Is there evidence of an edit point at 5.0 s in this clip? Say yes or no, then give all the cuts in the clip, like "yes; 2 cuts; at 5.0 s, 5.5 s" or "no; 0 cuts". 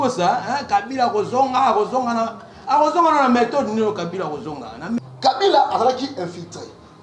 yes; 1 cut; at 5.0 s